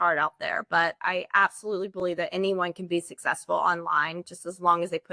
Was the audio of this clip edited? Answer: yes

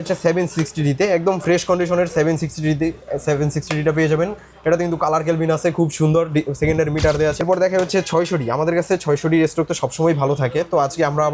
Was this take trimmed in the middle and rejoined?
yes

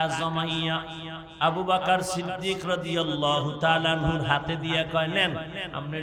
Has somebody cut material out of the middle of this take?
no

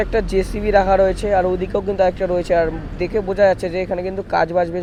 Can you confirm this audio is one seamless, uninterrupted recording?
yes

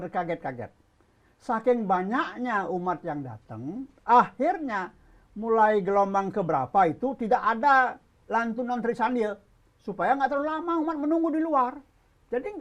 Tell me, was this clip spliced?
no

